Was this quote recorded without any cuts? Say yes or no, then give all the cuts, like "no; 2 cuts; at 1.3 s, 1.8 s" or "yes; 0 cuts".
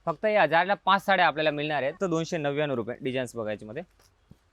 no; 1 cut; at 2.0 s